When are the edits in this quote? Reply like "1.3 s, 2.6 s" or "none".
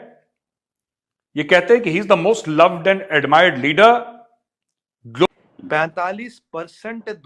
5.3 s